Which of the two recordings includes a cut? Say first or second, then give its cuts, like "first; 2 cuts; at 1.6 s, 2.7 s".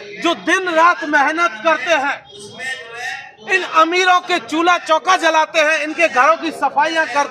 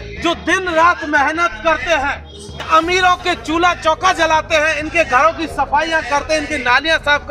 second; 1 cut; at 2.6 s